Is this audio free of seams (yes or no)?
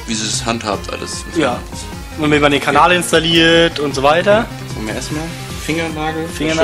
yes